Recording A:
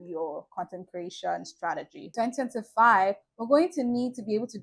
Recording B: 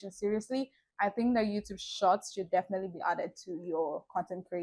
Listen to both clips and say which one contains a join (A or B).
A